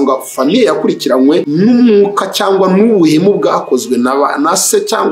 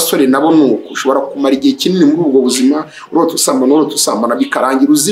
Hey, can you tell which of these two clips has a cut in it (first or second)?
first